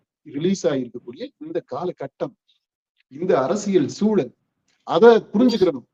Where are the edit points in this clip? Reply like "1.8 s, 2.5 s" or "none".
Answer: none